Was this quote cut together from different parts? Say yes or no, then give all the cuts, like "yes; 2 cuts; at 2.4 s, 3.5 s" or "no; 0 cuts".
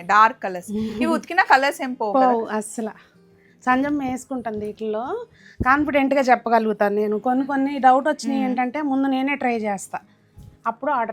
no; 0 cuts